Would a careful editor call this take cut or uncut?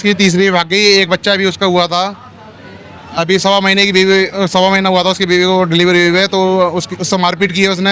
uncut